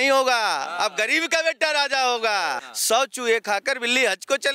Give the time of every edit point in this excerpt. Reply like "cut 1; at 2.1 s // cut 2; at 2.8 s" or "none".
cut 1; at 2.7 s